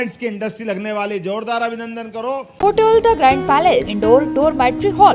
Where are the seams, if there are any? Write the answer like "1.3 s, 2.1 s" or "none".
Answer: 2.5 s, 3.9 s